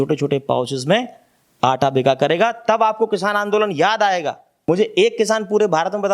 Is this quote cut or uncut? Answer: cut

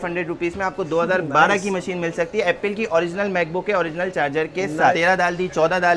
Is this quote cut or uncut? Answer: cut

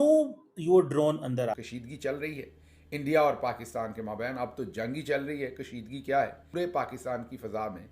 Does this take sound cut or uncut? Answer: cut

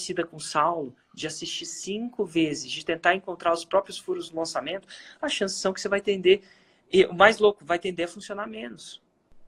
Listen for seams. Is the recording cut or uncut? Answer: uncut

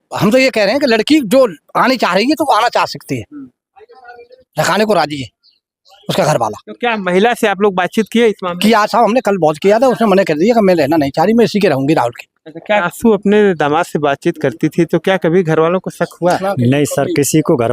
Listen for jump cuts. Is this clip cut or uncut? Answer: cut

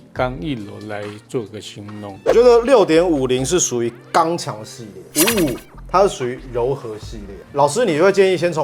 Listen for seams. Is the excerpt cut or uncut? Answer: uncut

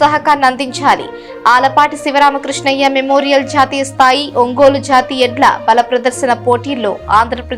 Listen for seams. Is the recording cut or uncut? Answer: uncut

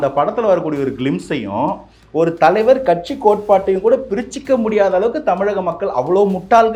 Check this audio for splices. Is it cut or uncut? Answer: uncut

